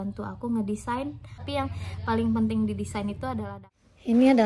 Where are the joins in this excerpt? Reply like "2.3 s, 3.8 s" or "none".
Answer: 3.5 s